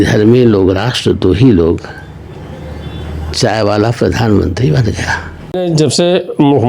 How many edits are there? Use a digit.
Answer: 1